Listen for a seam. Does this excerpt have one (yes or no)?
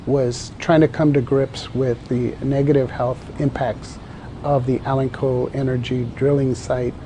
yes